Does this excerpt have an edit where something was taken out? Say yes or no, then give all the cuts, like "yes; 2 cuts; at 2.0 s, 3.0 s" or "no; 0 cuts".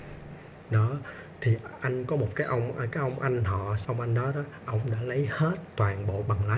yes; 1 cut; at 3.8 s